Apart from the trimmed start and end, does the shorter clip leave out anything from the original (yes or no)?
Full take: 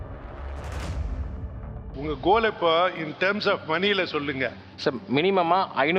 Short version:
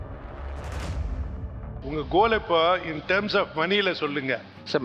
yes